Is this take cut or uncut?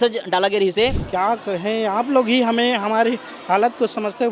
cut